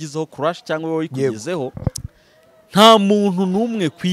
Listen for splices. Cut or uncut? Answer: cut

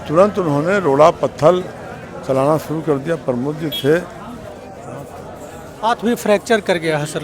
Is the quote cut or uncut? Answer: cut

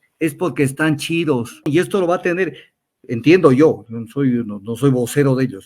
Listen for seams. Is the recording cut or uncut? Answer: cut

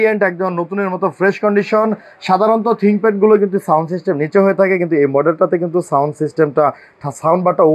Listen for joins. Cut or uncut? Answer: uncut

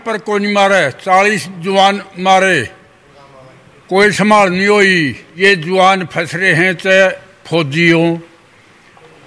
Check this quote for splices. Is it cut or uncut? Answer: cut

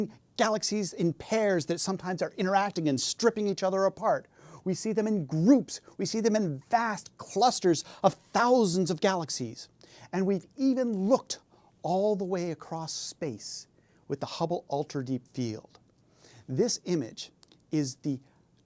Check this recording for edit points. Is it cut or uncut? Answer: uncut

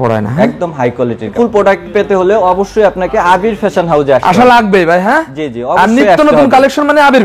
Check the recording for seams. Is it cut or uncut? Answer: cut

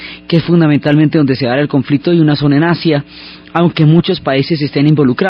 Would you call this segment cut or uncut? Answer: cut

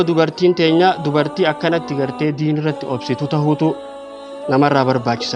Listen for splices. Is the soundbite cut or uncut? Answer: uncut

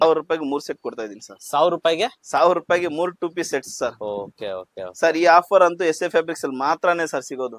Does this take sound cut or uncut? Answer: uncut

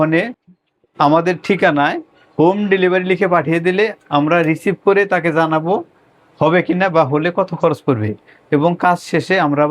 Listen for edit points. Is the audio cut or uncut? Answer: uncut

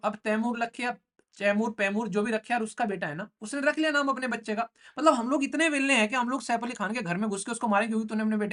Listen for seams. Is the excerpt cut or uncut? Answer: uncut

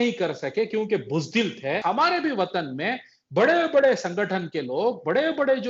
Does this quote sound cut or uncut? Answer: cut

